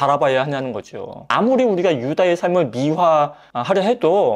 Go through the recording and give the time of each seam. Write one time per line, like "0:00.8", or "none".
0:01.3